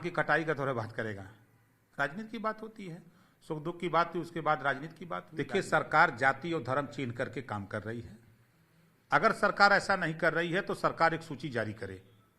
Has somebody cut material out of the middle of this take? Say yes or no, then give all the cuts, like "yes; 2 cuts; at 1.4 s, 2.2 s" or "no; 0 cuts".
yes; 1 cut; at 5.3 s